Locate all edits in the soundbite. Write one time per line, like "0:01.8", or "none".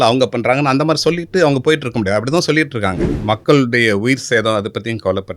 0:03.1